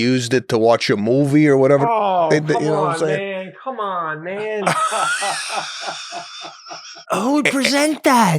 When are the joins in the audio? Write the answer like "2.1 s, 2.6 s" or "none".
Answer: 6.9 s